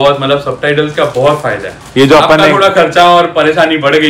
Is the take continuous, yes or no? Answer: yes